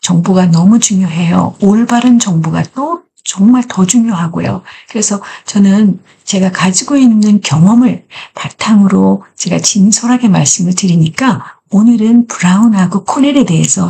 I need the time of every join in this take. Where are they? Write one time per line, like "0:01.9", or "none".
none